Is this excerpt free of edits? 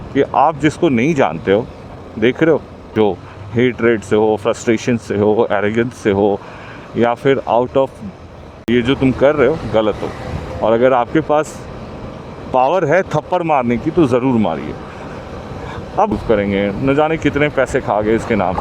no; 3 cuts; at 2.8 s, 8.7 s, 16.1 s

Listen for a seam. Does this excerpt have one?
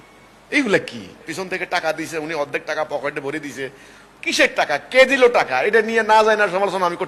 yes; 1 cut; at 1.2 s

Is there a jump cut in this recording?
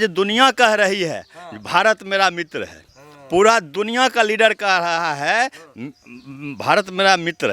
no; 0 cuts

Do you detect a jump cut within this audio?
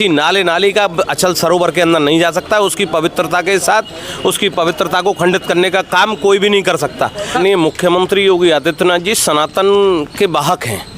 yes; 1 cut; at 7.3 s

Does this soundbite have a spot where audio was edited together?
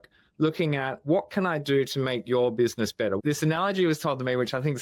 yes; 1 cut; at 3.2 s

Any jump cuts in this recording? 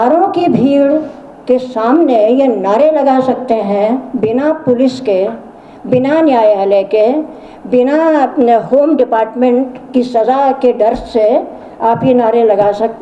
no; 0 cuts

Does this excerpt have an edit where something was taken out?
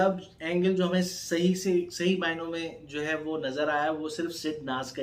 no; 0 cuts

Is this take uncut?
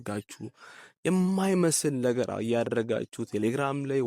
yes; 0 cuts

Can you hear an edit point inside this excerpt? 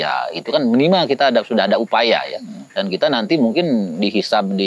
no; 0 cuts

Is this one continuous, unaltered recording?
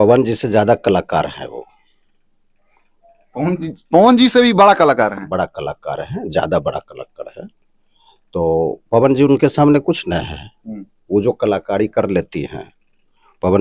yes; 0 cuts

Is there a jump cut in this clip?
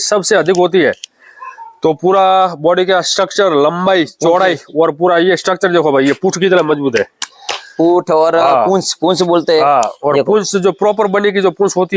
no; 0 cuts

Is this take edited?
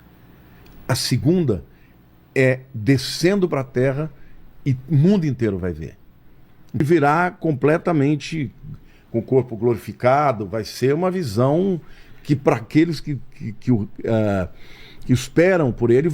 yes; 1 cut; at 6.8 s

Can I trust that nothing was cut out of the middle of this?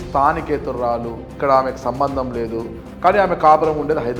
no; 2 cuts; at 1.3 s, 2.8 s

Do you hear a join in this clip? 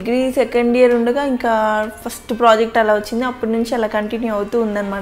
no; 0 cuts

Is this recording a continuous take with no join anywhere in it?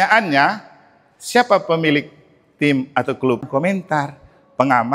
no; 1 cut; at 3.4 s

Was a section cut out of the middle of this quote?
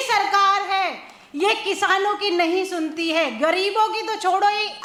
no; 0 cuts

